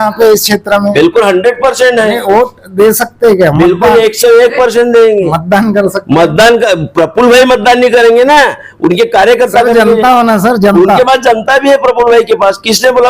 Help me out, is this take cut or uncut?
uncut